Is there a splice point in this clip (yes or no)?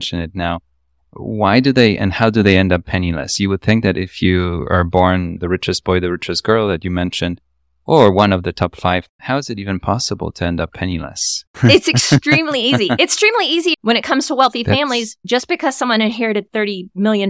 yes